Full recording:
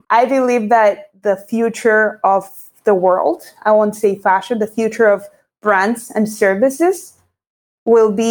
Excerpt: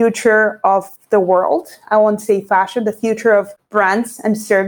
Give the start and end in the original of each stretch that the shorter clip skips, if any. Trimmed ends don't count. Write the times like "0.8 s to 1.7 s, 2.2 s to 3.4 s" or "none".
2.5 s to 2.7 s, 5.3 s to 5.5 s